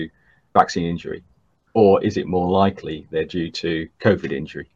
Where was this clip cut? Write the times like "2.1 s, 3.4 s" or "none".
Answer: none